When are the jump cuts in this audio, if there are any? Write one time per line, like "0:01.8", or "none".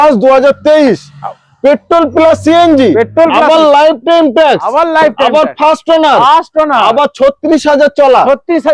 none